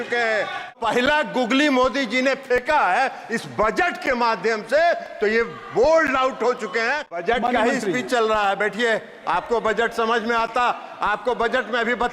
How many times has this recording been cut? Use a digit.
2